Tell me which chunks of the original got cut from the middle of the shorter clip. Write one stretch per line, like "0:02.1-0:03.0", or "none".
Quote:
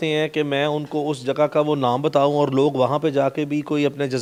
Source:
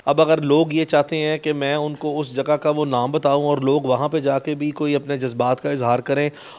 none